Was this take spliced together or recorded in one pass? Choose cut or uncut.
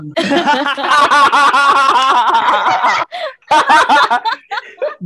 uncut